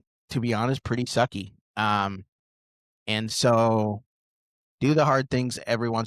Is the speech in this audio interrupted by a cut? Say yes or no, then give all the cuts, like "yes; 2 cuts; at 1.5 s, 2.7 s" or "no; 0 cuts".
no; 0 cuts